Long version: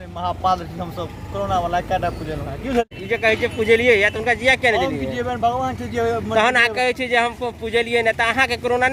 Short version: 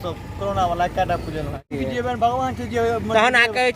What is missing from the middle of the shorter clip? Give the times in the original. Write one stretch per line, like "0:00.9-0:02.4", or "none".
0:02.6-0:04.9